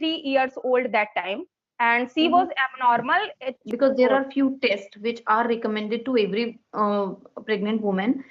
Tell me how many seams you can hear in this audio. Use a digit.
1